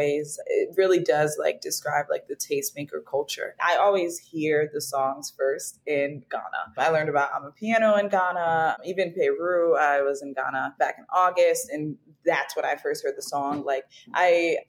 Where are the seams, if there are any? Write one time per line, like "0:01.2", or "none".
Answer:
0:03.6